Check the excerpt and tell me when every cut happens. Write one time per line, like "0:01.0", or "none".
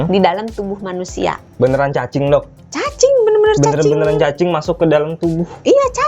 0:01.4